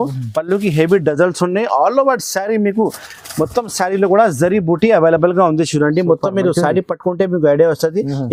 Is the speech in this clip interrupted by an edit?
no; 0 cuts

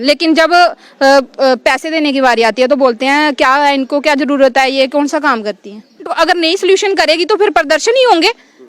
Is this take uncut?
no; 1 cut; at 6.1 s

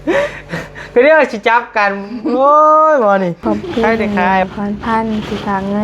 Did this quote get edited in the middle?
yes; 1 cut; at 4.4 s

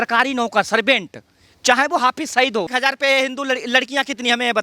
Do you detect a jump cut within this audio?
yes; 1 cut; at 2.7 s

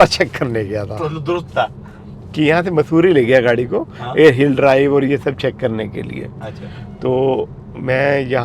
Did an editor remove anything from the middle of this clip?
no; 0 cuts

